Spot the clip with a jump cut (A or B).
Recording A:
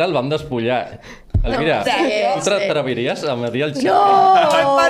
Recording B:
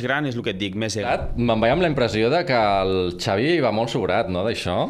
B